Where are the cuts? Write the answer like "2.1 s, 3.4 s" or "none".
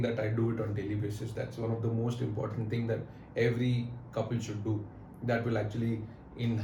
none